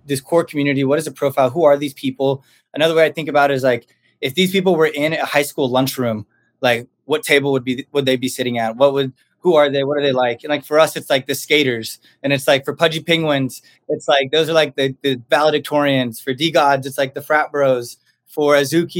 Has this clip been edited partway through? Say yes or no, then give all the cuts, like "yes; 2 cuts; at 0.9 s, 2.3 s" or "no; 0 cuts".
no; 0 cuts